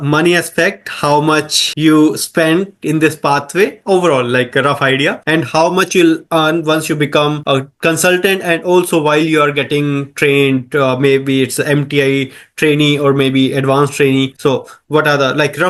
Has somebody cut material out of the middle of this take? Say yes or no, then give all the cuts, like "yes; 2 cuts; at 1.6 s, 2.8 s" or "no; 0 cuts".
no; 0 cuts